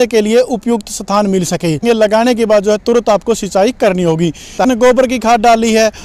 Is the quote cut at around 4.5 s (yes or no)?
yes